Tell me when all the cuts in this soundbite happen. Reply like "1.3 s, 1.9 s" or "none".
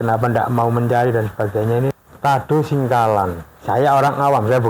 2.1 s, 3.5 s

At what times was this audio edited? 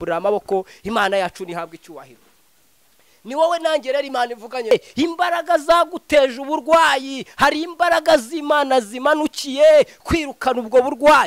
4.7 s

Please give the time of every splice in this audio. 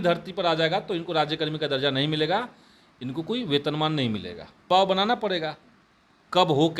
4.7 s

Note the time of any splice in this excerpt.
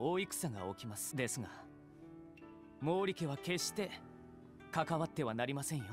1.0 s

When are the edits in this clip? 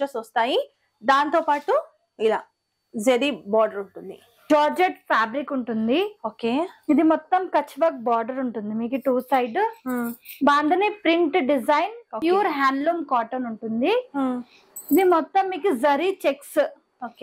4.5 s, 12.1 s

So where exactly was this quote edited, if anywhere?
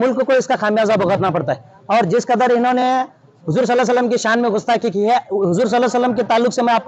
none

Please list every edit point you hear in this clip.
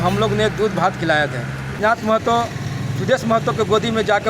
1.8 s

